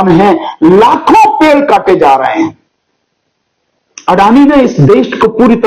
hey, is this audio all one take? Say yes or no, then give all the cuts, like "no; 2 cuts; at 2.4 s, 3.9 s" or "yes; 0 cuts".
yes; 0 cuts